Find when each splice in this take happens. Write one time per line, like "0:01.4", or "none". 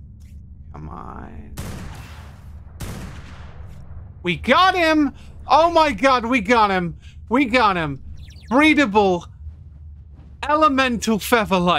none